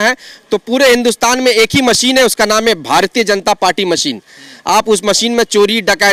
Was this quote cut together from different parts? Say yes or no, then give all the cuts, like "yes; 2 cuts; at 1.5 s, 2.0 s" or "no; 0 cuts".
no; 0 cuts